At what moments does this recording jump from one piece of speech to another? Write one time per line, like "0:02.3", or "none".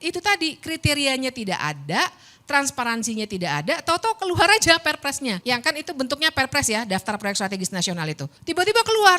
0:05.4
0:08.3